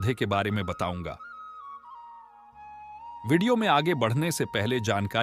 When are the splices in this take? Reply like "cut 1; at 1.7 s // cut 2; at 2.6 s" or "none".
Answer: cut 1; at 1.7 s // cut 2; at 3.2 s